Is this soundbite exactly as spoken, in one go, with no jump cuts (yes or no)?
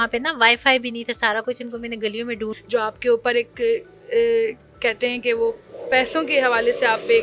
no